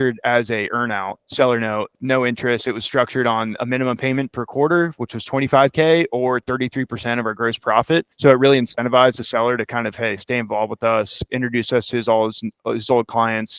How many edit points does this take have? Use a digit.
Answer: 3